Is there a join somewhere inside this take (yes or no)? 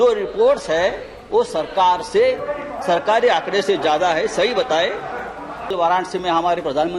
yes